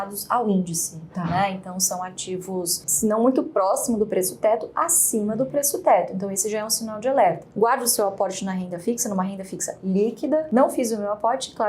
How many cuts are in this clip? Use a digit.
3